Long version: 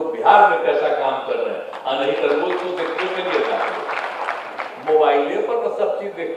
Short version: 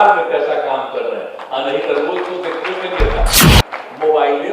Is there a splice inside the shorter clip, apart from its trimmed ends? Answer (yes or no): yes